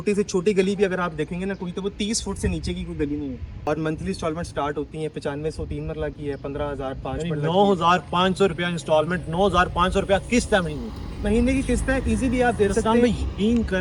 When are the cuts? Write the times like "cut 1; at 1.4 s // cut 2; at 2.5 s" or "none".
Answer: cut 1; at 3.6 s